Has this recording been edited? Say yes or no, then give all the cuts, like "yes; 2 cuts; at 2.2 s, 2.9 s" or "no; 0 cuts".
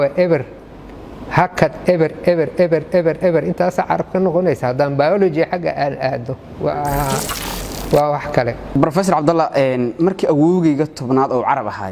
yes; 1 cut; at 6.4 s